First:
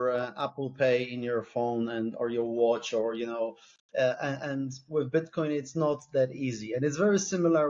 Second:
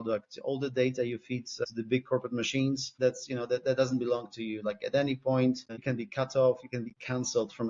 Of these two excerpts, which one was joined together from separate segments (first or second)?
second